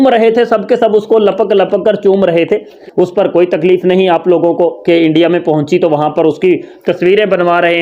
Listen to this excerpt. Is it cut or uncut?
cut